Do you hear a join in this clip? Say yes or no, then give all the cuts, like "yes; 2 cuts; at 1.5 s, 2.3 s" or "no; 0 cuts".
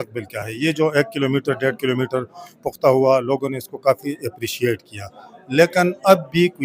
no; 0 cuts